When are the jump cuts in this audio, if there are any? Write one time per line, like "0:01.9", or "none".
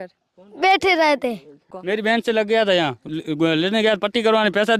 0:01.7